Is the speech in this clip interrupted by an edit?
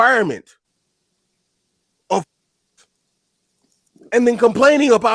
no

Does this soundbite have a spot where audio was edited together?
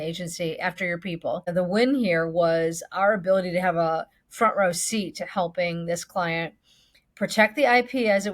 yes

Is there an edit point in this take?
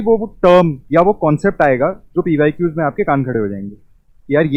no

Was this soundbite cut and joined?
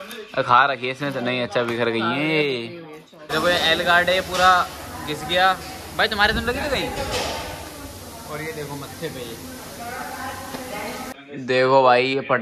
yes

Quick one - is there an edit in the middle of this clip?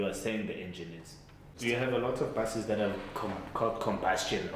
yes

